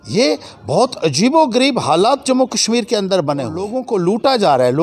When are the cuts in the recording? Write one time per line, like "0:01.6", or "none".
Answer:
0:03.8